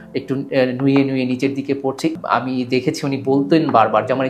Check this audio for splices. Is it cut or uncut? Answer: cut